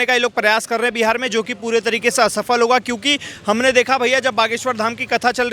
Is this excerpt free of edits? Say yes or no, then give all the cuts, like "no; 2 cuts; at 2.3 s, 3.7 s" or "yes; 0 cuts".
yes; 0 cuts